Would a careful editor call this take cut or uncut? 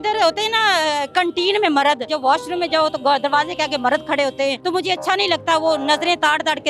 cut